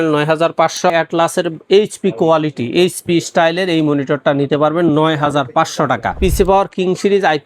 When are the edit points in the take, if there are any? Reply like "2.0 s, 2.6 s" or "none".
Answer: 0.9 s, 6.1 s